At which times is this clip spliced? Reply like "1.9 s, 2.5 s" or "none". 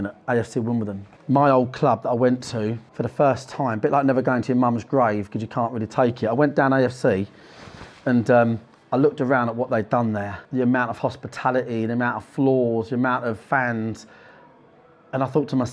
1.1 s, 2.9 s, 10.4 s

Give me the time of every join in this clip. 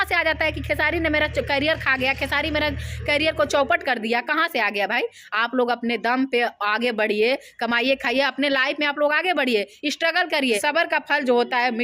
none

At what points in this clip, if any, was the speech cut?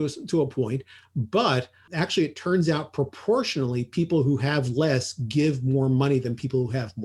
none

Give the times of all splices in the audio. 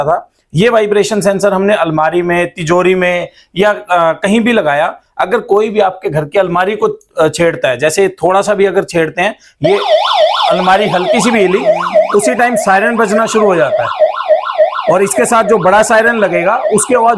none

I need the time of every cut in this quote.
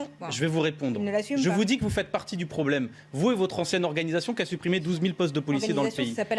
none

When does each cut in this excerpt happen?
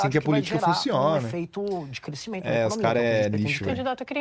none

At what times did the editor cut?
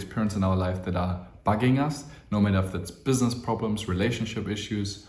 none

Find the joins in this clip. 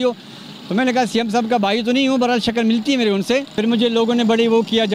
3.5 s

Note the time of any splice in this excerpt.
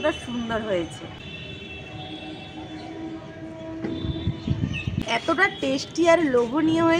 1.2 s, 4.9 s

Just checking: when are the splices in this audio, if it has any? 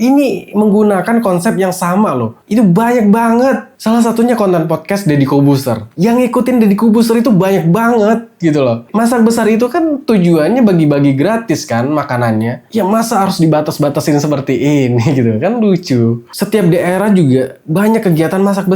8.8 s, 16.3 s

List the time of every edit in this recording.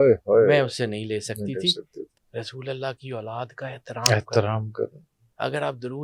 2.0 s

